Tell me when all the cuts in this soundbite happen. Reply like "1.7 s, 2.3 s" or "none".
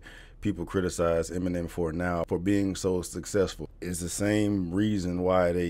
2.3 s, 3.7 s